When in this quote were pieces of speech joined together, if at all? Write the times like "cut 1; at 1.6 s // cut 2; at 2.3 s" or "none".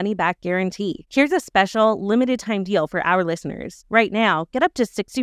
none